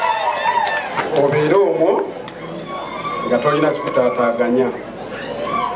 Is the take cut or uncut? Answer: cut